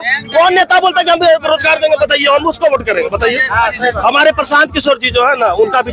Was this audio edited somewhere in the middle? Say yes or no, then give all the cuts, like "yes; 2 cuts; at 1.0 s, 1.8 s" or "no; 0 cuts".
no; 0 cuts